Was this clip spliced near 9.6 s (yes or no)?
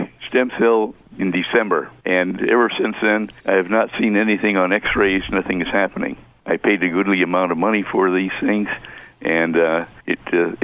no